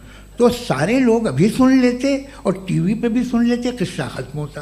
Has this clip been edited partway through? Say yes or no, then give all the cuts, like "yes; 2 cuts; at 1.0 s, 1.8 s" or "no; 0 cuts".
no; 0 cuts